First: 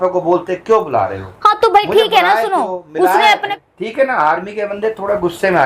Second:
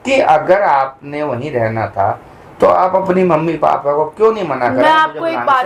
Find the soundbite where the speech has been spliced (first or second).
first